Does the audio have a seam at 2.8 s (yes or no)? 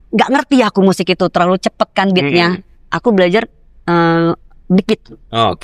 no